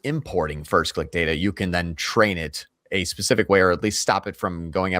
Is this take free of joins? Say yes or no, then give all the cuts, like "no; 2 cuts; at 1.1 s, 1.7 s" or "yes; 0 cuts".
yes; 0 cuts